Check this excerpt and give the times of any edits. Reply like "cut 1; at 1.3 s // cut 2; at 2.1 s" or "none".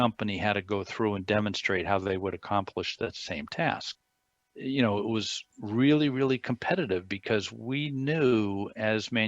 cut 1; at 4.3 s